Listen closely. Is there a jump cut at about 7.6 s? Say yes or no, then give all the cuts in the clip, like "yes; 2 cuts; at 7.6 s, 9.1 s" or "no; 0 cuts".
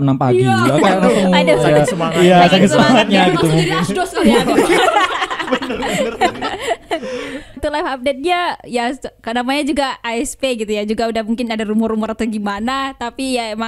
yes; 1 cut; at 7.6 s